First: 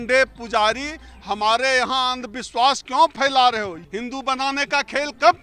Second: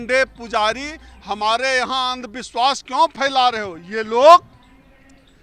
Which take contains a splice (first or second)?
first